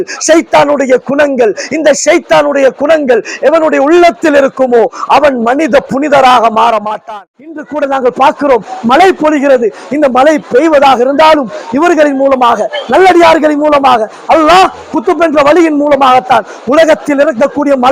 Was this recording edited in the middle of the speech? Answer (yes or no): yes